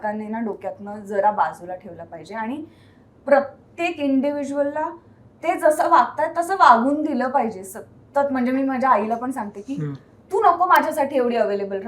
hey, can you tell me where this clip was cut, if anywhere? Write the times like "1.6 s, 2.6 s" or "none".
none